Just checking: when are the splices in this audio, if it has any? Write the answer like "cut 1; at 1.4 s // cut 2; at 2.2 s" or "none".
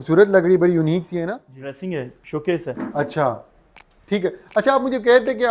cut 1; at 1.8 s